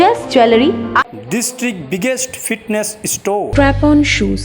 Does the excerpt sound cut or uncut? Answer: cut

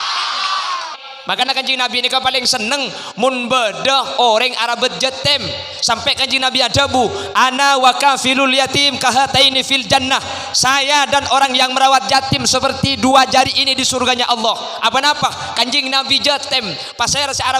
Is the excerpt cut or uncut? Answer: cut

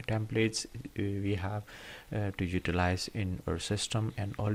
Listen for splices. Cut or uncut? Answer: uncut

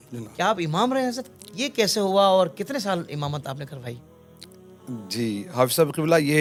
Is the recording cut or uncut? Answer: uncut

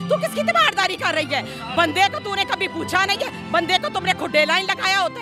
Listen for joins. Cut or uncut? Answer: uncut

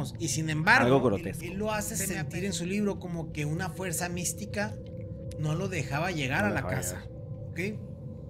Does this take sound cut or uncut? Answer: cut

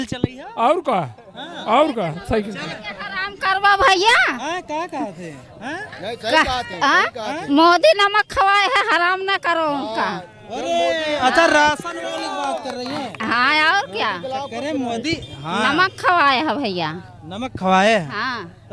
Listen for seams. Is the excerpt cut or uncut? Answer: uncut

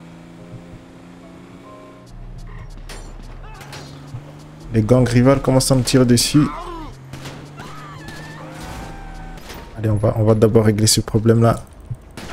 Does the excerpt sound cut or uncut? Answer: cut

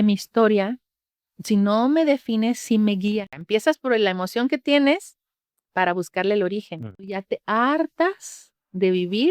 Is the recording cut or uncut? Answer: cut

